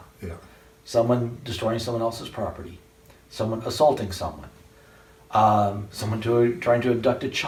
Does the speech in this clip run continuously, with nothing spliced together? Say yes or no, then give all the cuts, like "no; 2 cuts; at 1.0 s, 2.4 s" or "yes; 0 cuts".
yes; 0 cuts